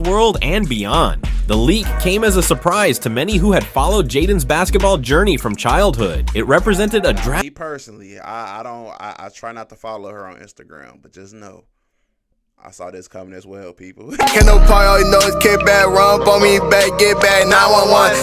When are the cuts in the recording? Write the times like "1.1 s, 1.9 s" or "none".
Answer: 14.2 s